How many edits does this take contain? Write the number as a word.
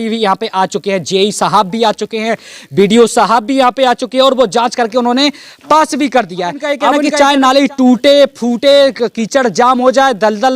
one